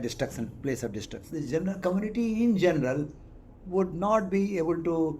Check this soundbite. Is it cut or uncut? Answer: cut